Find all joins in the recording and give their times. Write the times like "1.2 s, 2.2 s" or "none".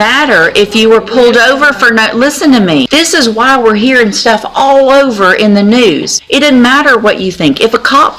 2.9 s, 6.1 s